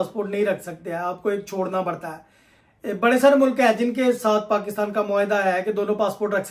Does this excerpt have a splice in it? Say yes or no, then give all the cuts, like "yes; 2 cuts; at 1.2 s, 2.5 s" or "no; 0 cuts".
no; 0 cuts